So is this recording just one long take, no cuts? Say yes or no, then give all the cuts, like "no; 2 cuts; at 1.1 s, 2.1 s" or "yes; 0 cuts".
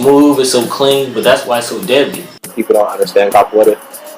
no; 1 cut; at 2.6 s